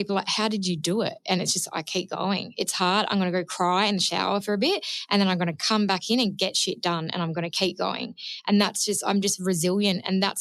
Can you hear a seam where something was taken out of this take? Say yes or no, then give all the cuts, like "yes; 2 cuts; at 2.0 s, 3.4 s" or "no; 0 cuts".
no; 0 cuts